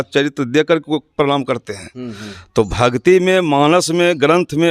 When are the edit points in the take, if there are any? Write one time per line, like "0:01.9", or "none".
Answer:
none